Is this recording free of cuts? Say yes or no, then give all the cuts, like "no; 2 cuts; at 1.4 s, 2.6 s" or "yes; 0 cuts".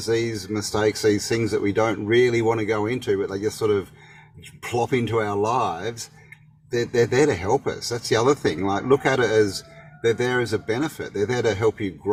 yes; 0 cuts